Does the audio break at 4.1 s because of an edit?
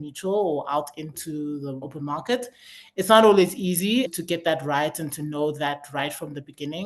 yes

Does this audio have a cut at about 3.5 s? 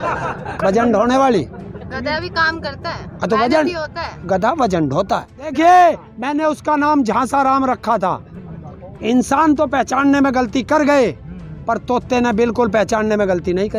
no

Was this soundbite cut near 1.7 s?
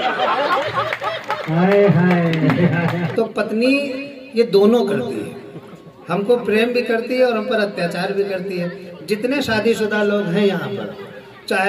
no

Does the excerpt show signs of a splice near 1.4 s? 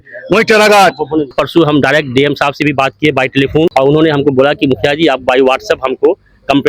yes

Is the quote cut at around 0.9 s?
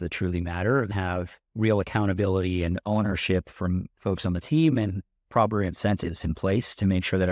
yes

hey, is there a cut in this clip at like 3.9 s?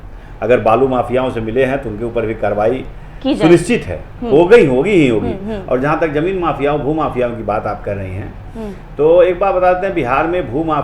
no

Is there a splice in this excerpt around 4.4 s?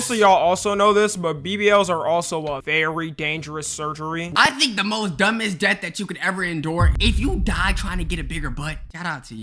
yes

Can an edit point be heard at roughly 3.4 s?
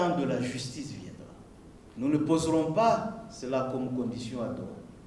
no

